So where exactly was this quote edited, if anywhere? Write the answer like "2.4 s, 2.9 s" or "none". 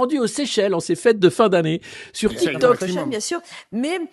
2.8 s